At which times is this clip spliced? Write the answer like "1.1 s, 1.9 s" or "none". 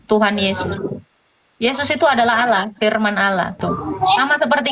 3.6 s